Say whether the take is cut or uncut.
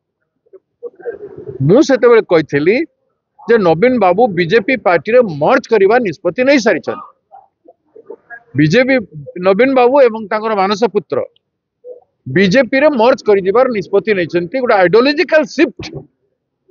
uncut